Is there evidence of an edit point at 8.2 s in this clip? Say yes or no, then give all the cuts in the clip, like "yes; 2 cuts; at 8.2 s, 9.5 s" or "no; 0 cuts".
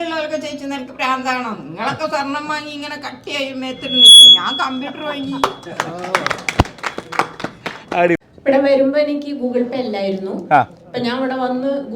yes; 1 cut; at 8.2 s